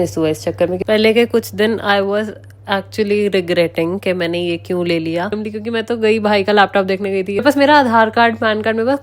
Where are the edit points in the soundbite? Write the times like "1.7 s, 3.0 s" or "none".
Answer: 0.8 s, 5.3 s, 7.4 s